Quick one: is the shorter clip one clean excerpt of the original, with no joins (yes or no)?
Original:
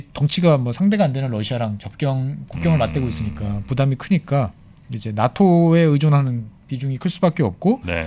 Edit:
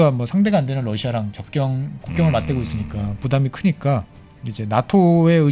yes